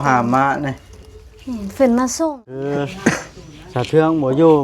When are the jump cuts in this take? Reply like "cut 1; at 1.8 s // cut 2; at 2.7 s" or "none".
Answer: cut 1; at 2.7 s